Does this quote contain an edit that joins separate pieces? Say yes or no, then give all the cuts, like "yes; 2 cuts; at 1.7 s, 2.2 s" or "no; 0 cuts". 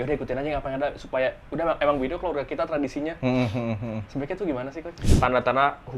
yes; 1 cut; at 5.0 s